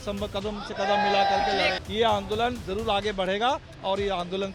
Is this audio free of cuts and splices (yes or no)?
no